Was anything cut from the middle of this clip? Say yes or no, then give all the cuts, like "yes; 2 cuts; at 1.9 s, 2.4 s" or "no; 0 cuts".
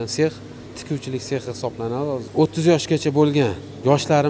yes; 1 cut; at 2.3 s